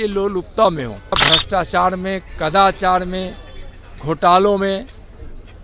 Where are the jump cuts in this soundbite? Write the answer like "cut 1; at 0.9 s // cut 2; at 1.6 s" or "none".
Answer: cut 1; at 1.2 s